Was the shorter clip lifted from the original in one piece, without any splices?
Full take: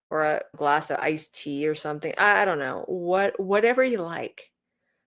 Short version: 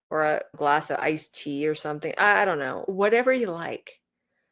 no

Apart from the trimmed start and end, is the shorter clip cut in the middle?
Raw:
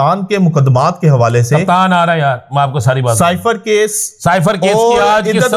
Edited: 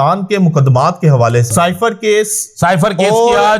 yes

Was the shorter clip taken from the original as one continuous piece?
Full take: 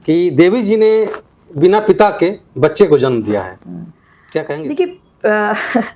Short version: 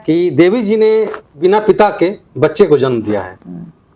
no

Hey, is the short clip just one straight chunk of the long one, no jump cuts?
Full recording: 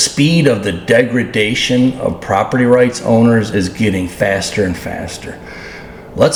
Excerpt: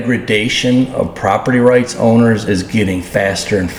yes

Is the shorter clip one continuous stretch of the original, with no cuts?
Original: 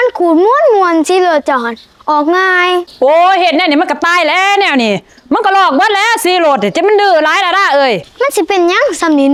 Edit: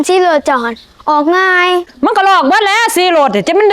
no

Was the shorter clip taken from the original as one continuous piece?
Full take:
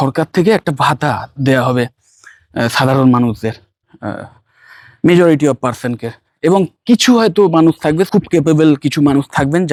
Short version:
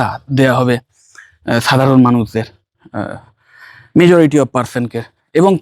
yes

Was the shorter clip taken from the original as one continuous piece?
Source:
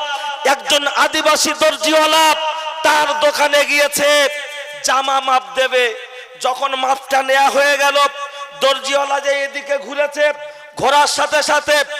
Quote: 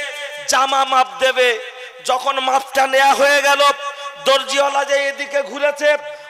yes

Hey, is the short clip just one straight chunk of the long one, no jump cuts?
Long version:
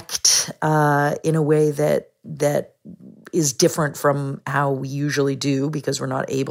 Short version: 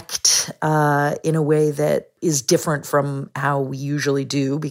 no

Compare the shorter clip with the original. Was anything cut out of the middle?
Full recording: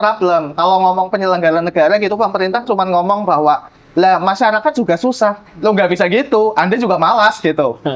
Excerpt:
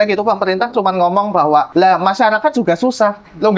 yes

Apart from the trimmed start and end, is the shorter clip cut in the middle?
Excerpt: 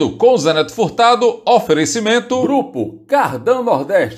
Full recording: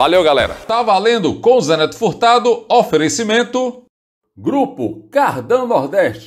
yes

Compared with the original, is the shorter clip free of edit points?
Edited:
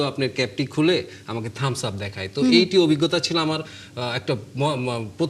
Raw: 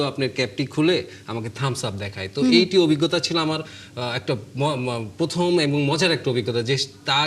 yes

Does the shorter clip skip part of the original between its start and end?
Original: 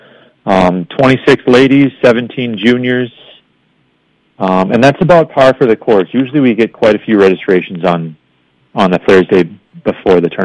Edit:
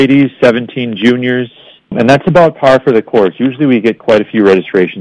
yes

